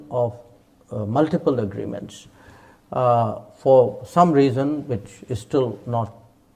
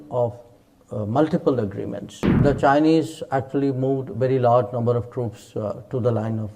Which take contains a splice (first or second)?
second